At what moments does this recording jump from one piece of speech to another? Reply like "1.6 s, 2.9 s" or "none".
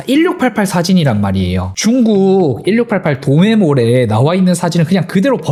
none